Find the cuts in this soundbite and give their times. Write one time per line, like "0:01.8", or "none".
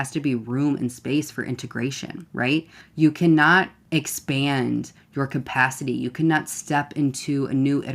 0:02.6
0:03.8